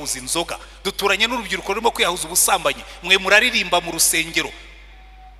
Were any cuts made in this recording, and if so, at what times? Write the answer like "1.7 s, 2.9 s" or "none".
none

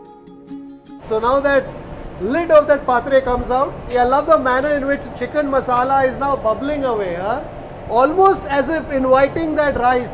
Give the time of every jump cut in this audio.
3.8 s

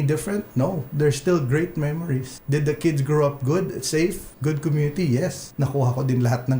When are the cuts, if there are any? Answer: 2.3 s, 4.3 s, 5.4 s

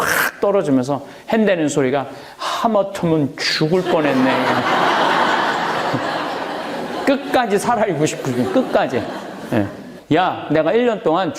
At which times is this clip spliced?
9.9 s

